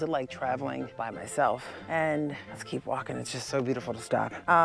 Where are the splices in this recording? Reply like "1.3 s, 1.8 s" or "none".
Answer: none